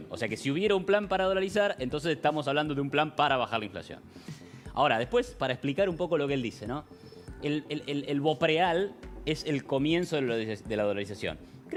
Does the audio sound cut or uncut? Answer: uncut